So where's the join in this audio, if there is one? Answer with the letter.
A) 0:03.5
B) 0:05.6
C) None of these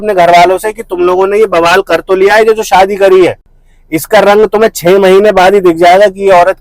C